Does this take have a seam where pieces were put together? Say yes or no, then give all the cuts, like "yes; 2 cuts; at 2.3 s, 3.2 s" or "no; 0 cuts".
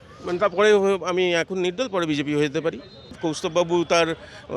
yes; 1 cut; at 3.2 s